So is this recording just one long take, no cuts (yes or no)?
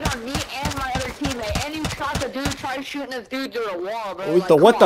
yes